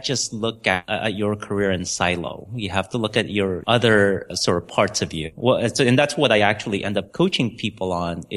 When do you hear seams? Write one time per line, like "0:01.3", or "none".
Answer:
0:00.8
0:03.6
0:04.3
0:05.3
0:07.1